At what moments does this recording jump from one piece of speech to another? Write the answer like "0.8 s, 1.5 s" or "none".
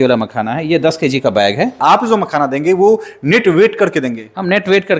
1.8 s